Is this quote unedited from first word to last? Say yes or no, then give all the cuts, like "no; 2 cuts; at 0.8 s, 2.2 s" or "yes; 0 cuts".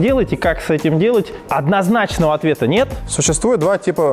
no; 2 cuts; at 1.4 s, 3.1 s